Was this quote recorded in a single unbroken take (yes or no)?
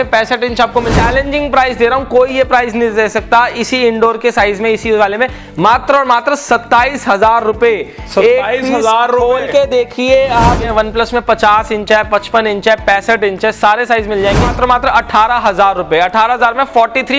no